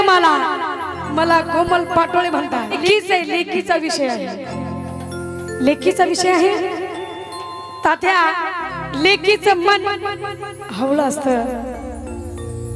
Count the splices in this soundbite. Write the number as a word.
one